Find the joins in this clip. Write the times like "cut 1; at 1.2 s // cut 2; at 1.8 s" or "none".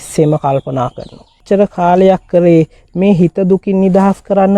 cut 1; at 1.4 s